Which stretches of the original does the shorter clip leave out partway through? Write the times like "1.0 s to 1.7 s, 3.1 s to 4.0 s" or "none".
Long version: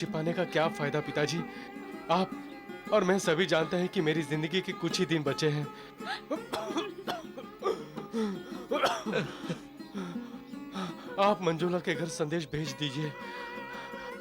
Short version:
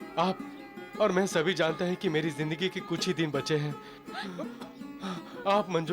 6.2 s to 10.0 s